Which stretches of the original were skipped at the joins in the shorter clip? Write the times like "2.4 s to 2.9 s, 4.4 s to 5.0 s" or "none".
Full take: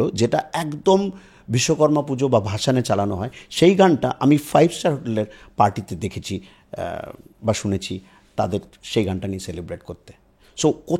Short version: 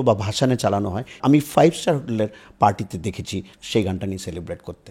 3.4 s to 4.1 s, 6.5 s to 8.8 s